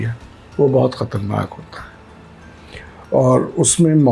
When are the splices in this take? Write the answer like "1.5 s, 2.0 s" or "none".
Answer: none